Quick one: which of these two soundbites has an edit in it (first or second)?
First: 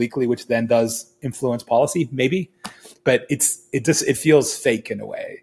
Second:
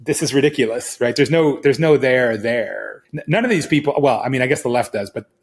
second